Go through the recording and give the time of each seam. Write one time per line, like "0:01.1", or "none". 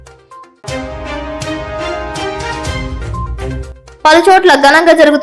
0:02.7